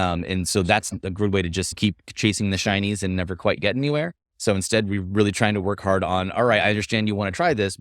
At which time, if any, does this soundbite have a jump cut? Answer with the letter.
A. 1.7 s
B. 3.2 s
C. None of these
A